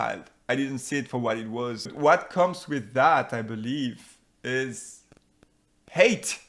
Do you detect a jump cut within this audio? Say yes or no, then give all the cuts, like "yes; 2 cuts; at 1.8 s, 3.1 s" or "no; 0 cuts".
yes; 1 cut; at 1.9 s